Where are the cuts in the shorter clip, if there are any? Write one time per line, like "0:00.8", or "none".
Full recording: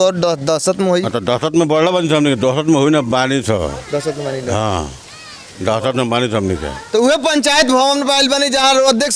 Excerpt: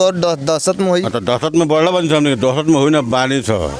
none